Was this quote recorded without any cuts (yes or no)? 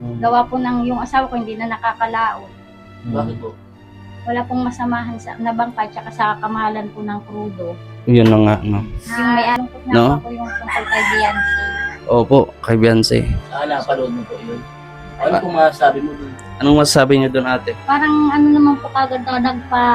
no